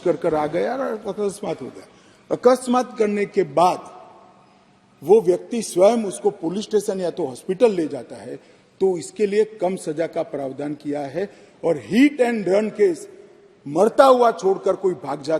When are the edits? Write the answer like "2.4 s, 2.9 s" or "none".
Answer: none